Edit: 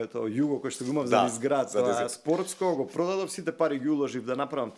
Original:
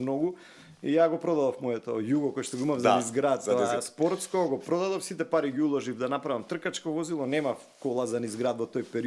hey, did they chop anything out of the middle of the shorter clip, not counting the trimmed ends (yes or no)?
no